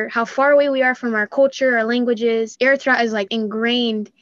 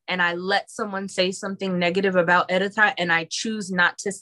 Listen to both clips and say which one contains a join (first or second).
first